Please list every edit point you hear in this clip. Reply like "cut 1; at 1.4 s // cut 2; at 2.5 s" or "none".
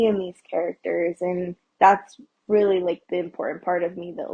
cut 1; at 1.6 s